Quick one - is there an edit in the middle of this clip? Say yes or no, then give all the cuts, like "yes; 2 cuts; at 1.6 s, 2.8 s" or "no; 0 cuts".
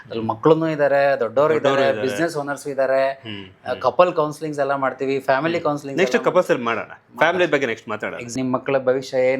yes; 1 cut; at 8.2 s